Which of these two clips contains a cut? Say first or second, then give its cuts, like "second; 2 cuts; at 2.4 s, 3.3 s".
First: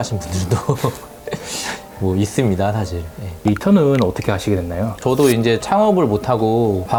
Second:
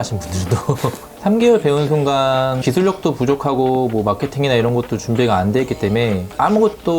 second; 2 cuts; at 1.1 s, 2.6 s